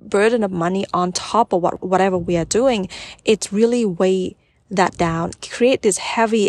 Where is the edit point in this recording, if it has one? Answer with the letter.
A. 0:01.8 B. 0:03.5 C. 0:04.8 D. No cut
A